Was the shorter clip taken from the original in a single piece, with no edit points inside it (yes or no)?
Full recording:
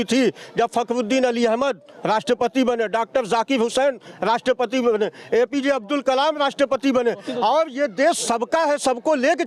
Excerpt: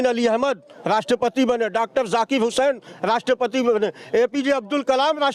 yes